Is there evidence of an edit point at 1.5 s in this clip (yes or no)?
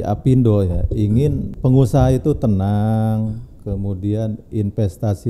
yes